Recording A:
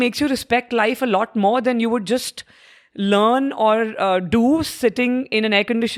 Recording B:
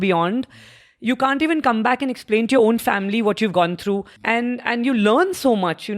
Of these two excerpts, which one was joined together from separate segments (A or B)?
B